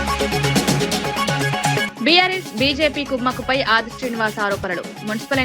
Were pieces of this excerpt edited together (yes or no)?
yes